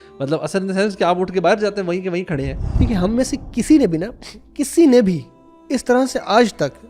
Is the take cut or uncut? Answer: cut